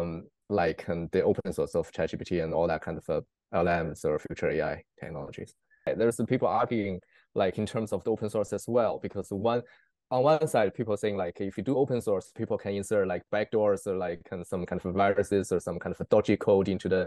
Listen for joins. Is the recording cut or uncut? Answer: cut